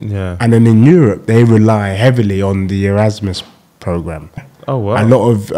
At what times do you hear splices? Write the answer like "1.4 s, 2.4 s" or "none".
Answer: 4.5 s